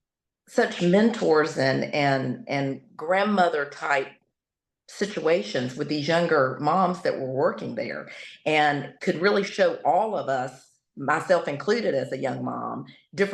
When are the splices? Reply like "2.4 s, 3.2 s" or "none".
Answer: none